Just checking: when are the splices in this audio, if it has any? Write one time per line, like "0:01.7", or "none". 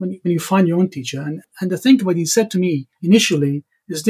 0:01.5
0:02.9